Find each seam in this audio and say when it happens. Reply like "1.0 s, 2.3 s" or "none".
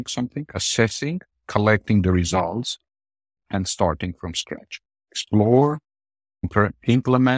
6.5 s